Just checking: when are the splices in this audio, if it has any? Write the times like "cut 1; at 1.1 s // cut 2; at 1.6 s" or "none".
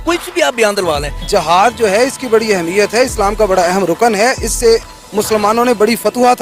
cut 1; at 1.2 s